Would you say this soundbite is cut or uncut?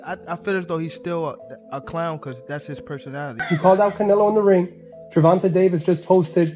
cut